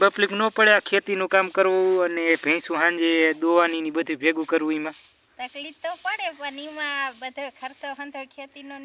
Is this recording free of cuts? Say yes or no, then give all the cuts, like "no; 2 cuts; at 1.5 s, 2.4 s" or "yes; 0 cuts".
yes; 0 cuts